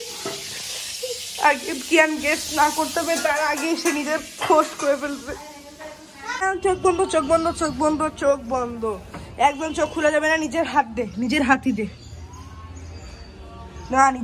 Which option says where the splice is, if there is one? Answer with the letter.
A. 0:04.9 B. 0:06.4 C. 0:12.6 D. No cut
B